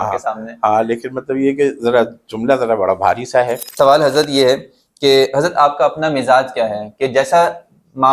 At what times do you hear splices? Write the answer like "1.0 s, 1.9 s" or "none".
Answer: 3.6 s